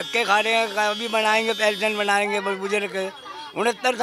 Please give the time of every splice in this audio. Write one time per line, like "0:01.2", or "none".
none